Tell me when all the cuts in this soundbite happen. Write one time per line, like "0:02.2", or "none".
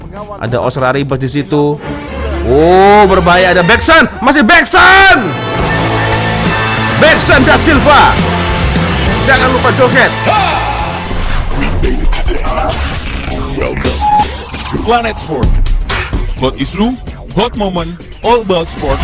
0:11.0